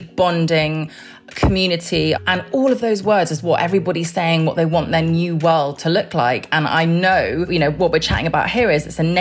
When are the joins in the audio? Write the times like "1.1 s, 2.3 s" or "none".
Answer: 2.2 s, 7.5 s